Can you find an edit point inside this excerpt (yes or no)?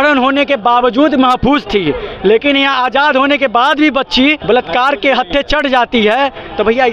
yes